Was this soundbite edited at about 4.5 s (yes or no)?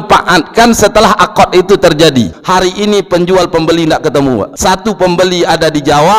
yes